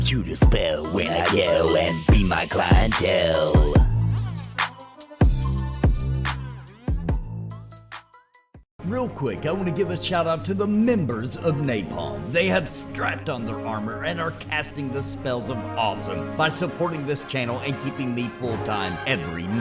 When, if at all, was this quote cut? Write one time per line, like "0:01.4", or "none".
none